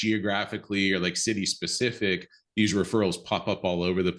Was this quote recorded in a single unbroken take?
yes; 0 cuts

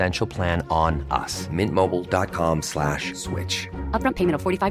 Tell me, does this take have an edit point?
no; 0 cuts

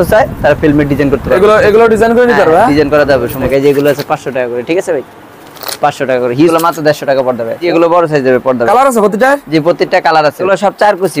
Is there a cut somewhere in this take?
yes; 4 cuts; at 3.5 s, 6.5 s, 7.6 s, 10.5 s

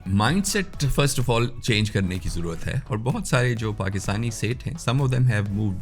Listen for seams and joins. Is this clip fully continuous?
yes; 0 cuts

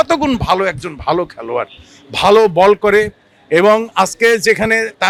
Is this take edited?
no; 0 cuts

